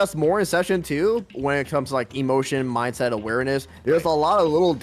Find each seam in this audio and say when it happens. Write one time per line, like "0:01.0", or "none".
none